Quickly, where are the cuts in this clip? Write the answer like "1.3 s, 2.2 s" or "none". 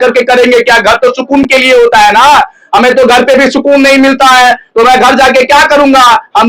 none